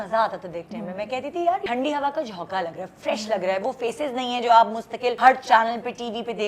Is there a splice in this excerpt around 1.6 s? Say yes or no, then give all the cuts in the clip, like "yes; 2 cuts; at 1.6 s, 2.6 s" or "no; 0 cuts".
yes; 2 cuts; at 1.6 s, 5.1 s